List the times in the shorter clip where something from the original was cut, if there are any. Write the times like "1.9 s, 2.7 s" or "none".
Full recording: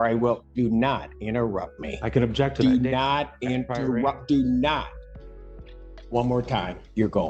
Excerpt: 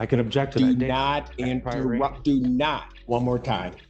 2.9 s

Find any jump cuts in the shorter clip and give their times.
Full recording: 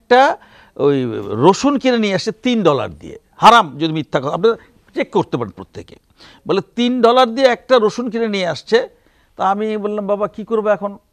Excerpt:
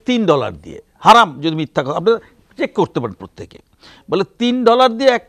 none

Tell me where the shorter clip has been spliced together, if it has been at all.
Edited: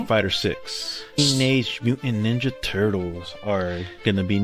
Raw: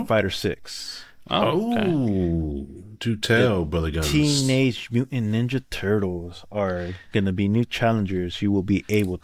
1.2 s

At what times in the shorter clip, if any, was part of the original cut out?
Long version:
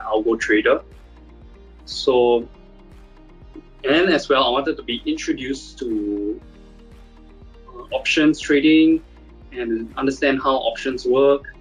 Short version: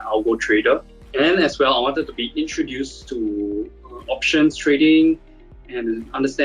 1.0 s, 3.9 s

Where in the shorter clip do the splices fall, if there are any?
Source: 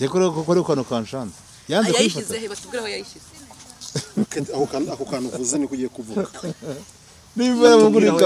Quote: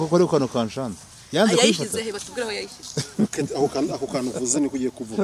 2.8 s

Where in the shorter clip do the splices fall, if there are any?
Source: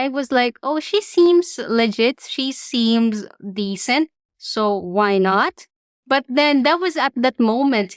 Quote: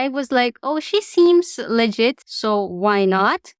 2.3 s

